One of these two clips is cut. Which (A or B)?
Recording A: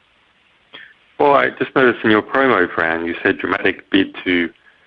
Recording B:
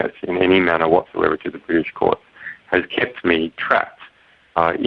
A